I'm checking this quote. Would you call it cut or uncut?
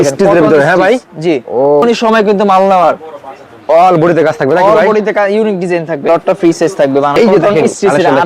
cut